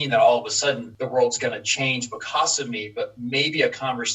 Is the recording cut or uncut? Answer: cut